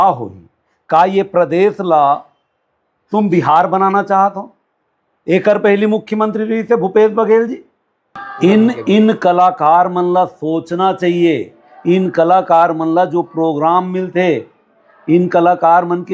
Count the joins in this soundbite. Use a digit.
1